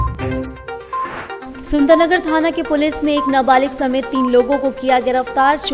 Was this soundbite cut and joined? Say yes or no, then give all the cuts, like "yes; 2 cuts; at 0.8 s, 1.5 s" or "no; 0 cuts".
no; 0 cuts